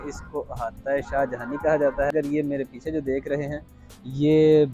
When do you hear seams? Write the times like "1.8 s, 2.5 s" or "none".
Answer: 2.1 s